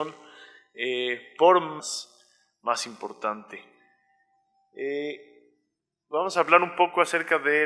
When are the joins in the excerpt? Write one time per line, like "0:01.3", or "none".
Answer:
none